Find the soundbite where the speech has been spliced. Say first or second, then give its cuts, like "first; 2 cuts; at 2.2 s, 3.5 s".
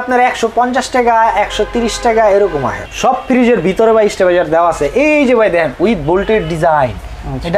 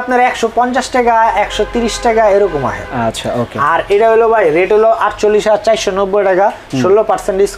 first; 1 cut; at 2.8 s